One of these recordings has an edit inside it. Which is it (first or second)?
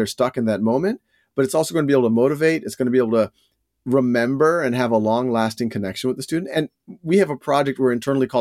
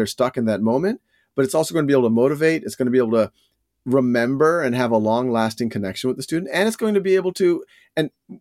first